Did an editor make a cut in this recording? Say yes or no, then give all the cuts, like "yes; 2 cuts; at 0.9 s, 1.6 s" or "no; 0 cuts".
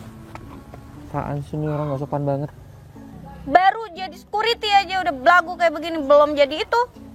yes; 1 cut; at 3.3 s